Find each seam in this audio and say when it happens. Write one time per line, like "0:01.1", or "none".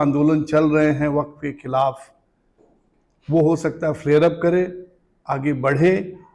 none